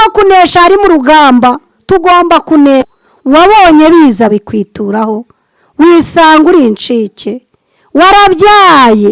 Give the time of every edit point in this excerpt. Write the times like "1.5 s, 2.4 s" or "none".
2.8 s